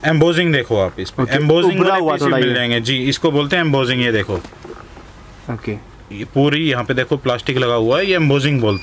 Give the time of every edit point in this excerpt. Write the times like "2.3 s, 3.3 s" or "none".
none